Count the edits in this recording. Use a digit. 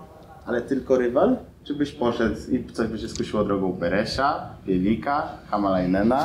0